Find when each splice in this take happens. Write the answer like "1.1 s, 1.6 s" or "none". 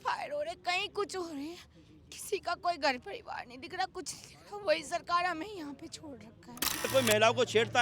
6.9 s